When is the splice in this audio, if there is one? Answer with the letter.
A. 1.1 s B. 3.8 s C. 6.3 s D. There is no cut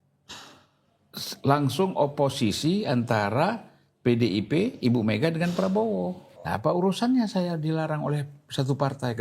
C